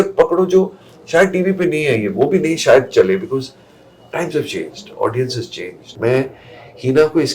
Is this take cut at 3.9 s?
no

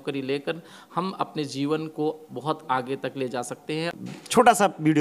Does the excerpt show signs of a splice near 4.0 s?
yes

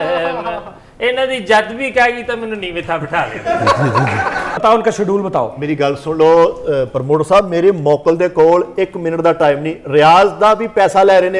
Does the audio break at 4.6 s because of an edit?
yes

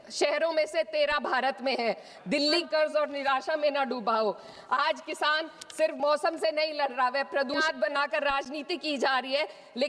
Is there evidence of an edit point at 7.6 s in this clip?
yes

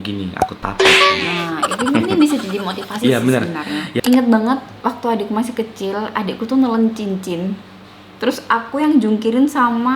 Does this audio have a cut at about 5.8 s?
no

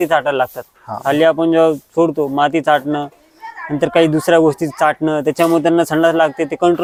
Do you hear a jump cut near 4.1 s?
no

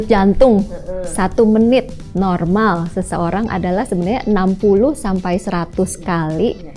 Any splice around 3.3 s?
no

